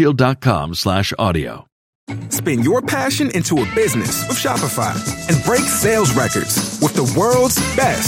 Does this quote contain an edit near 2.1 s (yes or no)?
yes